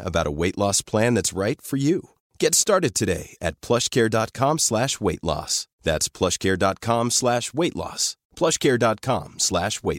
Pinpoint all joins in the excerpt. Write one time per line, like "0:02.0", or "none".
none

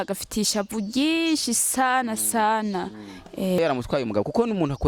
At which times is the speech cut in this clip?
0:03.6

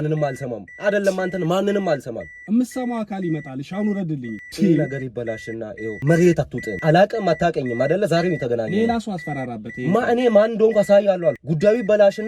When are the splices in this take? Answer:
0:04.4
0:05.9
0:06.7
0:11.5

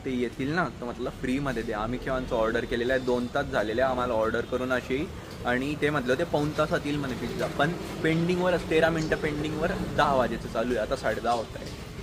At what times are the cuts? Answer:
none

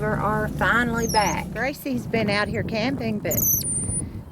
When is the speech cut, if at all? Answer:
0:01.7

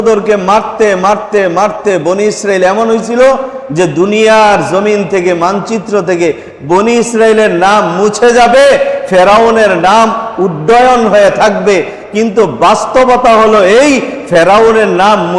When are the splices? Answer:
none

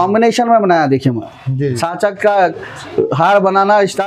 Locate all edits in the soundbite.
0:01.8

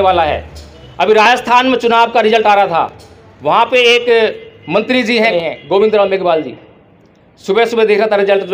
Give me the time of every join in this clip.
none

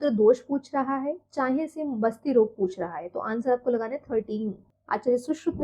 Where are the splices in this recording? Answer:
0:04.7

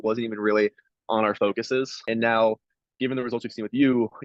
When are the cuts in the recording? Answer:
0:02.0

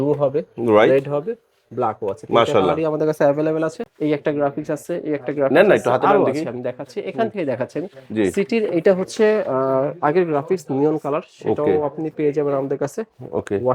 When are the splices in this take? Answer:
0:03.8

